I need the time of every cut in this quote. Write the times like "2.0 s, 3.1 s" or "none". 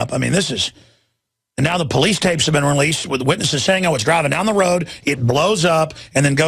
3.8 s